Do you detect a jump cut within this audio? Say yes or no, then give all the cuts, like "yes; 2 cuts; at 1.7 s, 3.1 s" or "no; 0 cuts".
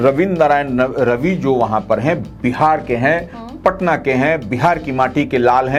no; 0 cuts